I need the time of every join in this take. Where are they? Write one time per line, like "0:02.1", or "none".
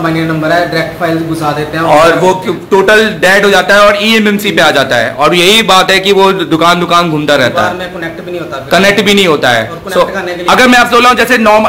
0:10.4